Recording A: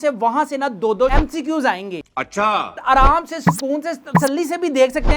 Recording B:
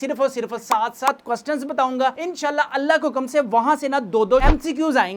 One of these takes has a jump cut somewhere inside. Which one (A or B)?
A